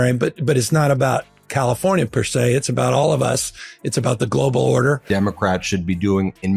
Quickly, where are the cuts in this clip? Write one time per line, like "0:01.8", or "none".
0:05.0